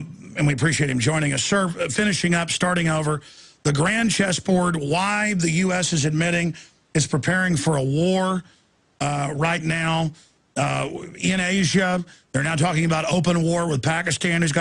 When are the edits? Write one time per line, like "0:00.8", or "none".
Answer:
0:13.2